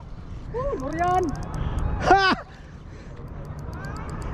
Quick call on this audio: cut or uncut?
uncut